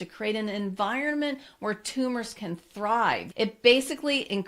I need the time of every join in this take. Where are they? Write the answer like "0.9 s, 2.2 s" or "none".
3.2 s